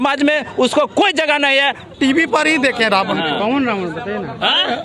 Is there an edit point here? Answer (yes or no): yes